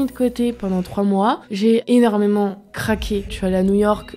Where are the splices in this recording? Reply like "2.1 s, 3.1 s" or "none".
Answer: 1.8 s, 3.3 s